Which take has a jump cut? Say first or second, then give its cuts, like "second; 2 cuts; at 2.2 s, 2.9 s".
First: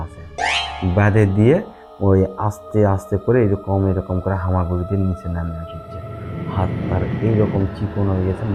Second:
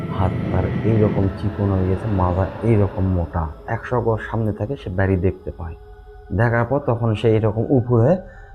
second; 1 cut; at 3.6 s